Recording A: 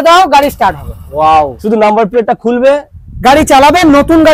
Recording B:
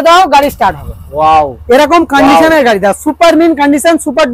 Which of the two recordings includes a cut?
A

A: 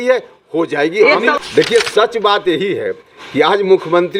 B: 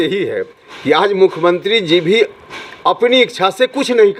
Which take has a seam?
A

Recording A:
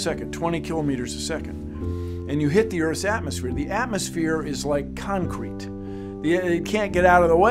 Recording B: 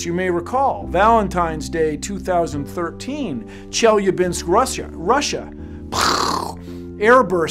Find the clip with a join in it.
B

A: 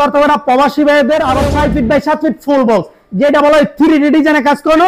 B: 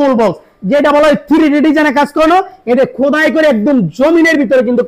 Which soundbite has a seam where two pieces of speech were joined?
A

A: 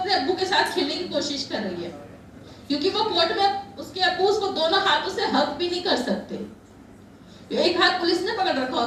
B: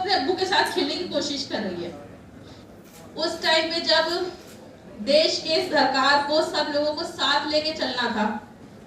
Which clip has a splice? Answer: B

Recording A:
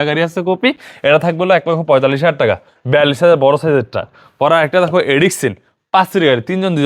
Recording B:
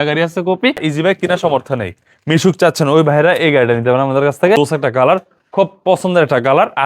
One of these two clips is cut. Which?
B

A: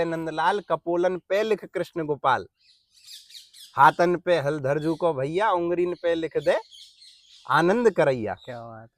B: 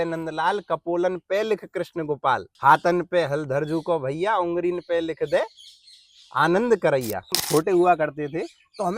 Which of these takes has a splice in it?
B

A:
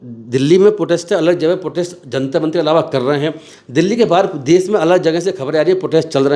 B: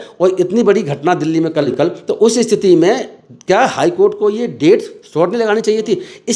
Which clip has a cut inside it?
B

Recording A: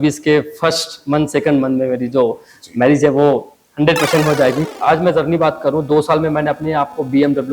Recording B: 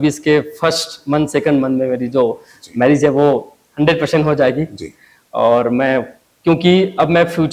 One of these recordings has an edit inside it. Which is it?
A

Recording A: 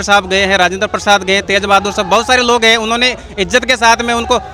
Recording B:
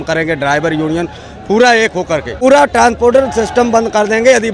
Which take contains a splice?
B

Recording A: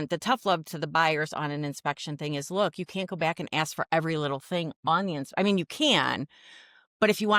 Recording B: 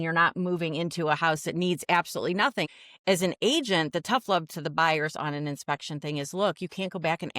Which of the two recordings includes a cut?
B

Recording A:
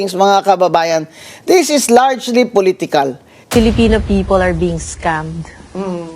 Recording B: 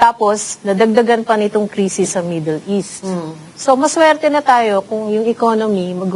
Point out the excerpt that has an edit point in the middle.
A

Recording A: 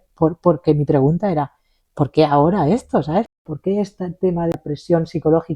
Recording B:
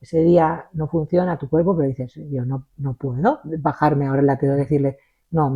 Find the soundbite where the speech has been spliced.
A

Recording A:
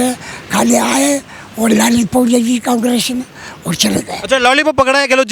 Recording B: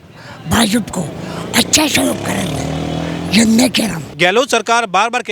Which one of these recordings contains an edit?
B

